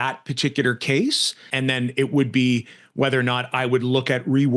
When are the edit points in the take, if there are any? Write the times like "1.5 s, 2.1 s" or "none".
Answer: 1.5 s